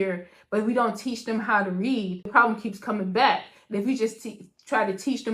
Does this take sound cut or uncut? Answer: cut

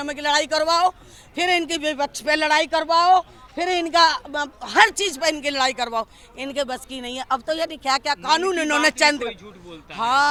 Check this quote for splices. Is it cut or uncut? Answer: uncut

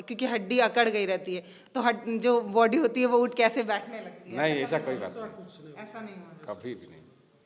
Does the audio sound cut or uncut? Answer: uncut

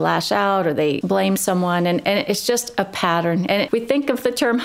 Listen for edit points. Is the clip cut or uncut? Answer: cut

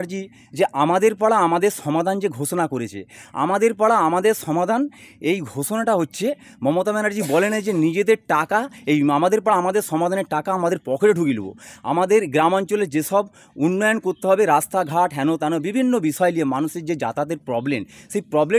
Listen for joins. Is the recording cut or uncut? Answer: uncut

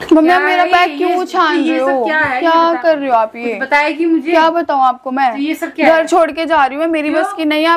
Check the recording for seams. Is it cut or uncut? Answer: uncut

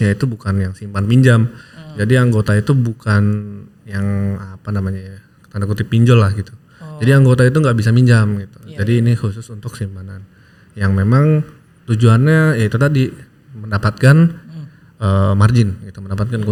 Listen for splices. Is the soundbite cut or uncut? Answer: uncut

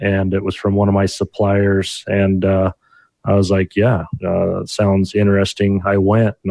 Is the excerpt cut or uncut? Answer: uncut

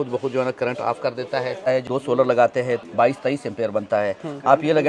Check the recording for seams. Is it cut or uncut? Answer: cut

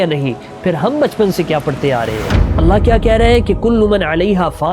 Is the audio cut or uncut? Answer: uncut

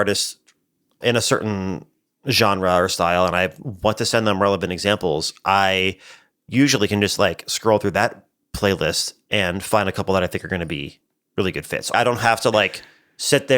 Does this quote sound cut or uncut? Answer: cut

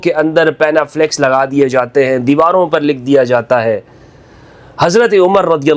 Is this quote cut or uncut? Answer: uncut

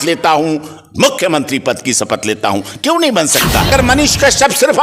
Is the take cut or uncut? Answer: cut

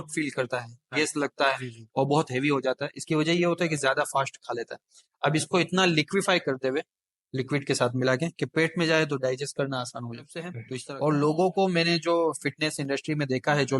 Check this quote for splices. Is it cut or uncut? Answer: cut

